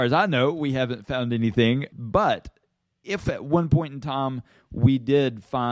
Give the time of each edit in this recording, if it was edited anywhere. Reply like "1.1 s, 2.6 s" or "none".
1.9 s, 3.2 s